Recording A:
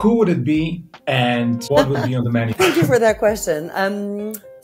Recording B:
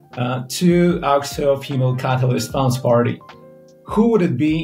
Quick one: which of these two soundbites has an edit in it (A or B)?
A